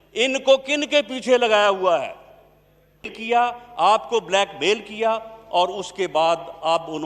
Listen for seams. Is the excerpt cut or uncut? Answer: cut